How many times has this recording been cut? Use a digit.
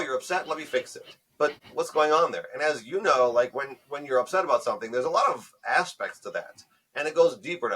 1